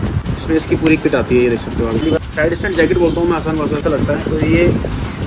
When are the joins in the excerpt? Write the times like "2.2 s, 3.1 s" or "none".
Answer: 2.0 s, 3.8 s